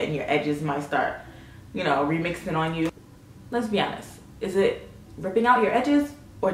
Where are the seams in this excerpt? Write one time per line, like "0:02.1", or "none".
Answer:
0:02.9